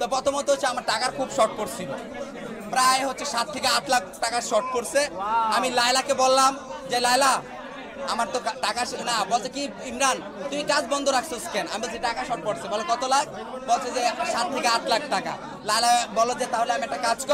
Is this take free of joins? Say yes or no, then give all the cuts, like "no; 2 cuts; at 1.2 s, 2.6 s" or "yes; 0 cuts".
yes; 0 cuts